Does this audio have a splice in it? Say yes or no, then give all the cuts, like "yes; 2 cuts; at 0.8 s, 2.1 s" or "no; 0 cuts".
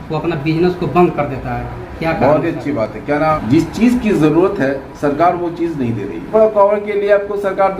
yes; 2 cuts; at 3.3 s, 6.3 s